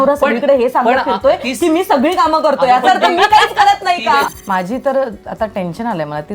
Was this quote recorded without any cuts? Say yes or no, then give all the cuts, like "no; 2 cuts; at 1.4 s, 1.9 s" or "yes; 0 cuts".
no; 1 cut; at 4.3 s